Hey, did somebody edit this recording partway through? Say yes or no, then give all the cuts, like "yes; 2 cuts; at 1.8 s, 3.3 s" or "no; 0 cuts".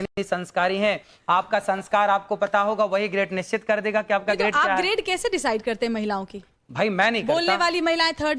no; 0 cuts